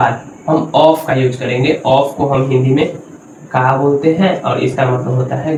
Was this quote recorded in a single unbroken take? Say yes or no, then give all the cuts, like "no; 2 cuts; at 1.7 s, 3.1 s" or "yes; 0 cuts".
yes; 0 cuts